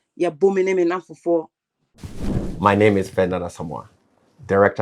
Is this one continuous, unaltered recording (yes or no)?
yes